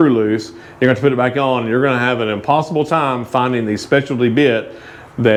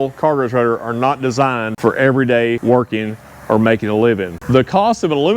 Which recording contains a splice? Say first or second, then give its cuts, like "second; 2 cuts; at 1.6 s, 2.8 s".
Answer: second; 3 cuts; at 1.7 s, 2.6 s, 4.3 s